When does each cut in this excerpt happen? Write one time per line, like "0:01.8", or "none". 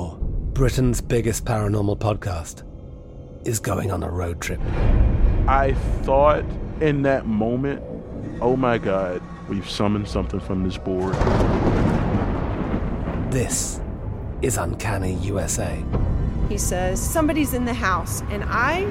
none